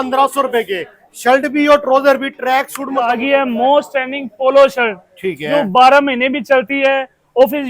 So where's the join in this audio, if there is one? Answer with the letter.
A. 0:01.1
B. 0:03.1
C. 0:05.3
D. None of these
B